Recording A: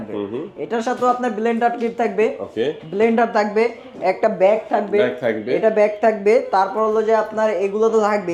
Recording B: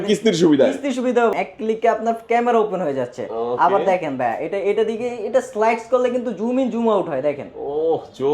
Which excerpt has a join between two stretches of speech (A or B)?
B